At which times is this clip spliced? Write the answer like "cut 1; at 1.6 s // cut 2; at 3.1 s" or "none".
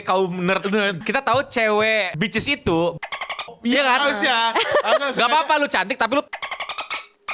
cut 1; at 1.0 s // cut 2; at 2.1 s